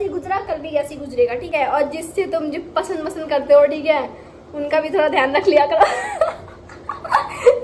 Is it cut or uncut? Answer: cut